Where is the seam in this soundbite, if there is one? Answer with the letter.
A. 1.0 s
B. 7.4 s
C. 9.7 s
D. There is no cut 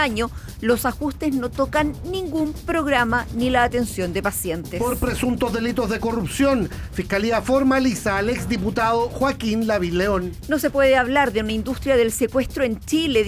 D